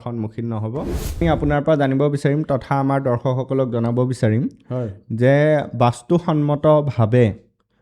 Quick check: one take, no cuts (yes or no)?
no